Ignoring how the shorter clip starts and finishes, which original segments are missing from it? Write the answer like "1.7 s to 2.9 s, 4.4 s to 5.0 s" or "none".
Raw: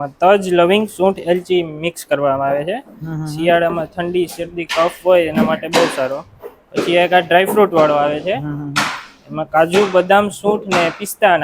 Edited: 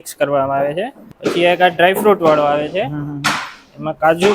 2.9 s to 6.5 s